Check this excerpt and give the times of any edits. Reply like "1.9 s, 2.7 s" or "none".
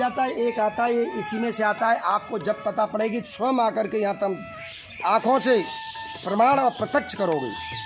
none